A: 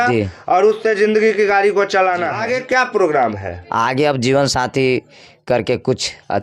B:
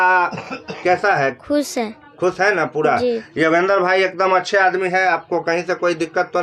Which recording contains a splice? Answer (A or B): A